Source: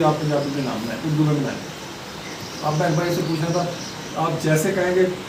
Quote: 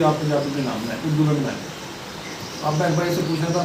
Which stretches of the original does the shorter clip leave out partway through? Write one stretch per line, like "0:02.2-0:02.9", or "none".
none